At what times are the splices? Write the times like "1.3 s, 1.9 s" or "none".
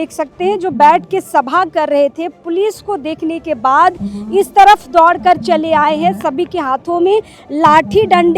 none